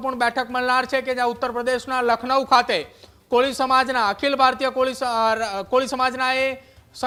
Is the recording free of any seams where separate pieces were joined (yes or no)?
yes